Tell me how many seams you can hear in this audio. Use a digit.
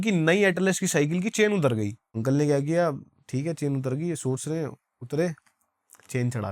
1